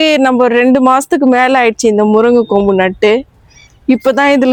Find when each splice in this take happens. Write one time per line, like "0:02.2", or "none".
none